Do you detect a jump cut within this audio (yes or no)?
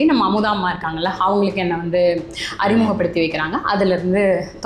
no